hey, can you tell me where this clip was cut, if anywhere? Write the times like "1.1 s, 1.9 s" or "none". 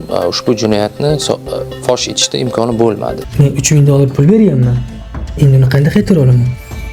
3.2 s